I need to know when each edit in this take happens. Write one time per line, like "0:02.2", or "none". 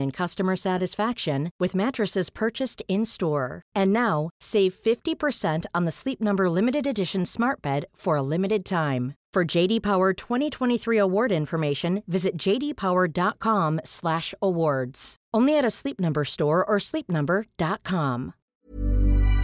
0:18.5